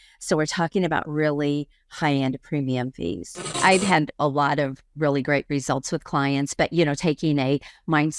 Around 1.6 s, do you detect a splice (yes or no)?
no